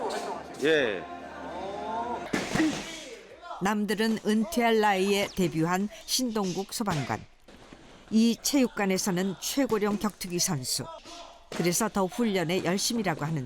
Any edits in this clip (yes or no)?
yes